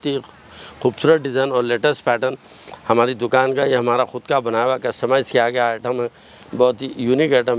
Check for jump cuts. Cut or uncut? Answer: uncut